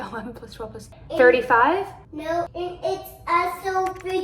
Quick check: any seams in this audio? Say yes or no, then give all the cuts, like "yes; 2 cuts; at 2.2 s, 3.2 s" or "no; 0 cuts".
yes; 2 cuts; at 0.9 s, 2.5 s